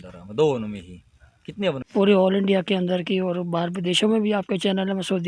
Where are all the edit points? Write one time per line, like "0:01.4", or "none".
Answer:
0:01.8

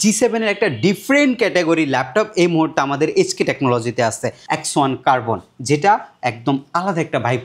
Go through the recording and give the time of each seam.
0:04.4

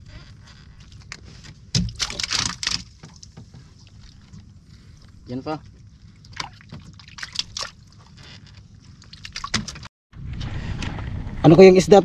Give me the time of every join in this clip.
0:09.8

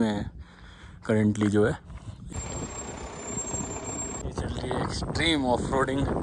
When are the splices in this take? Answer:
0:02.4
0:04.2

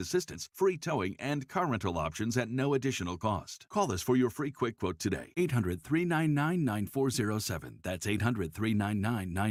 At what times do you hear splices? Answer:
none

